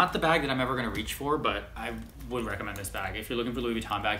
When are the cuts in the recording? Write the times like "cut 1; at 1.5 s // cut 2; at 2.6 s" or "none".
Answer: cut 1; at 1.7 s

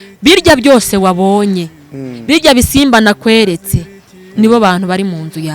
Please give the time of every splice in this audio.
none

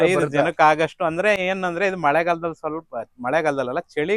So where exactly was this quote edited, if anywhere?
none

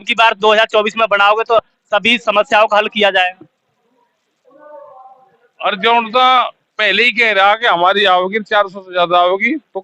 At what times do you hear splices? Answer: none

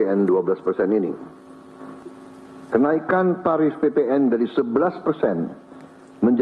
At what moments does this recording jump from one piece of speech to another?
cut 1; at 2.0 s

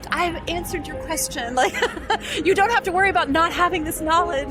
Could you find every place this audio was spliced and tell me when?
none

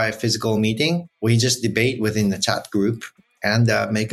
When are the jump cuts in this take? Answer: cut 1; at 1.1 s

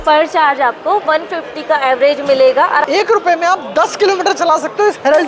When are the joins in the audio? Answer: cut 1; at 2.8 s

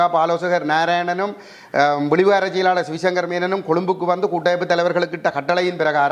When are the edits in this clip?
none

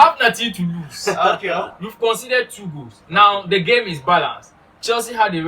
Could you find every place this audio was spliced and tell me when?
cut 1; at 1.8 s

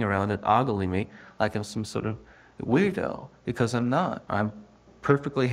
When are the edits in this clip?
cut 1; at 4.2 s

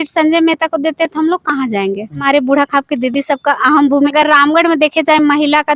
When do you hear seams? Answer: cut 1; at 2.2 s // cut 2; at 4.1 s

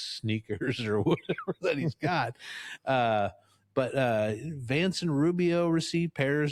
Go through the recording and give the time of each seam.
none

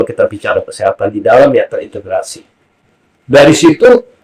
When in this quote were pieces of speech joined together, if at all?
none

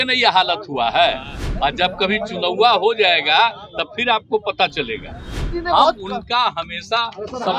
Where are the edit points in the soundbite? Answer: cut 1; at 5.5 s

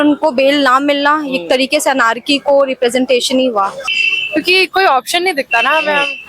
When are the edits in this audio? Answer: cut 1; at 3.8 s

